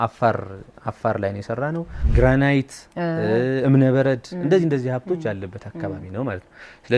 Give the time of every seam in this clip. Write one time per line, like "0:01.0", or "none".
0:01.9